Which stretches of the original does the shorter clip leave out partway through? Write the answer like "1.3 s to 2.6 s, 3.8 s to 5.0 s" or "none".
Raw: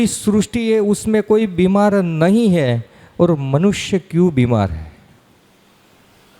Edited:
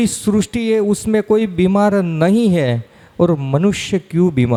none